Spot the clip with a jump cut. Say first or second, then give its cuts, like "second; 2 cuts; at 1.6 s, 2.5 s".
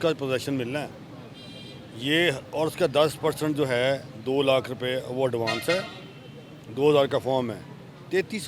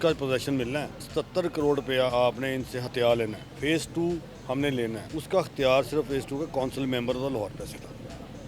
second; 3 cuts; at 1.1 s, 3.5 s, 5.1 s